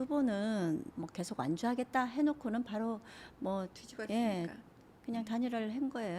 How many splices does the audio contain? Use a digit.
1